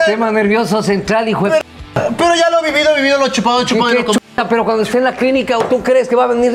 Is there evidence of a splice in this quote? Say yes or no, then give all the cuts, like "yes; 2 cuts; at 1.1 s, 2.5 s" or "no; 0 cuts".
no; 0 cuts